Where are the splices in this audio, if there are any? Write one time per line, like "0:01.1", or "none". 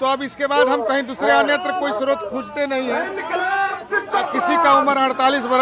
none